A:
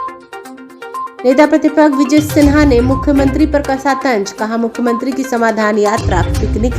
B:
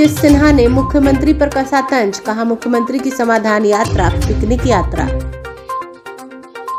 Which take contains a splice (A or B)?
A